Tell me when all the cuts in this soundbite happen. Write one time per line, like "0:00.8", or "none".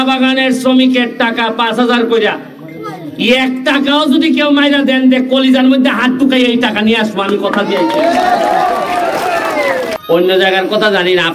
0:10.0